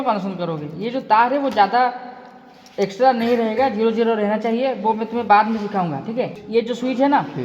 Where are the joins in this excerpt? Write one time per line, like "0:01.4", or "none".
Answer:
0:06.4